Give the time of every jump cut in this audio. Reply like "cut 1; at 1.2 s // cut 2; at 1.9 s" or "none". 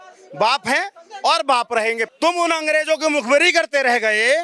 cut 1; at 2.1 s